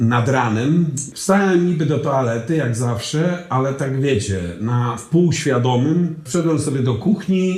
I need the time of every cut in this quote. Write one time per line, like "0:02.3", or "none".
0:01.1
0:06.2